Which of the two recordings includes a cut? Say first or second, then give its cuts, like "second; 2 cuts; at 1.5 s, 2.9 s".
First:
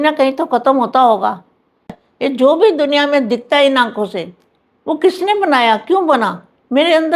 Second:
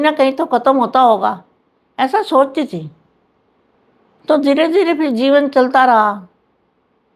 first; 1 cut; at 1.9 s